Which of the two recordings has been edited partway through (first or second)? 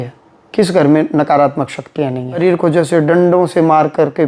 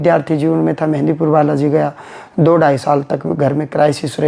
first